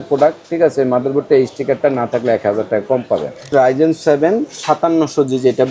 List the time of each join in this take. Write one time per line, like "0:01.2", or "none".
0:03.5